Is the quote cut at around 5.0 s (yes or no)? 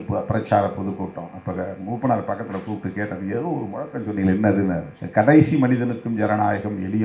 yes